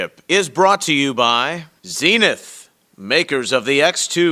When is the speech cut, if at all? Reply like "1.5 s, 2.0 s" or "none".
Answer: 1.6 s